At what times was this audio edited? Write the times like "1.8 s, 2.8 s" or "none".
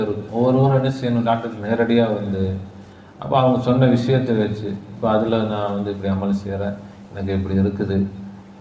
none